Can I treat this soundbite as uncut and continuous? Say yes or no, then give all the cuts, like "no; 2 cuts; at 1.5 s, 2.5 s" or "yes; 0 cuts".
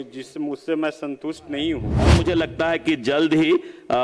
no; 1 cut; at 1.9 s